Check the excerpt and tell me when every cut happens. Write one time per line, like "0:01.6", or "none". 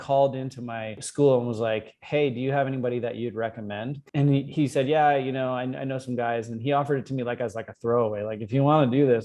0:01.0
0:03.9